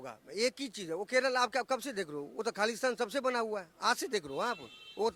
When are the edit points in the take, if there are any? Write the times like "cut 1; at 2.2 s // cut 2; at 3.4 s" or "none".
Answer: none